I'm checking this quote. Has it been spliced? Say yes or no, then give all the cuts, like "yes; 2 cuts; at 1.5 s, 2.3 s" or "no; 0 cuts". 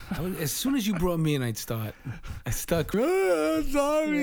yes; 1 cut; at 2.9 s